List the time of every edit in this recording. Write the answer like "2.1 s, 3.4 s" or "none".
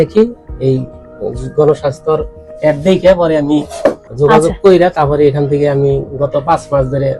4.1 s